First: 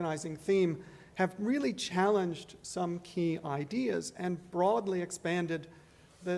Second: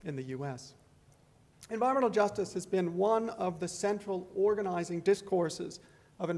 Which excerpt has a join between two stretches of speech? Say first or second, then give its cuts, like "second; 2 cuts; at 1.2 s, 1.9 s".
first; 1 cut; at 1.5 s